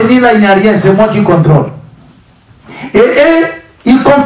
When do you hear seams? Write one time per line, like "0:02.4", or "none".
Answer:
none

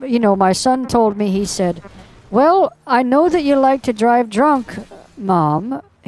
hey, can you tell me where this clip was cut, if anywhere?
none

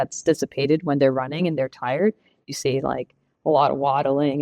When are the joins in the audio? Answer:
none

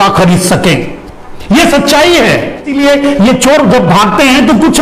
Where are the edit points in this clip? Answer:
0:02.7

